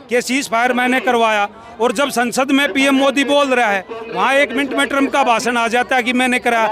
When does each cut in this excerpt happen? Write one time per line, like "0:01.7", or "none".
none

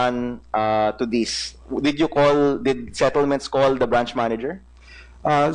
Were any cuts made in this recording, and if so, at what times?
0:04.3

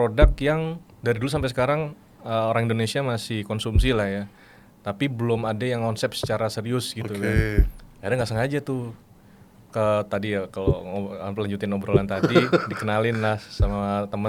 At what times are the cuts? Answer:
none

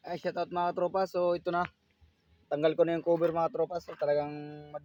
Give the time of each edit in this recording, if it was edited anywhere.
none

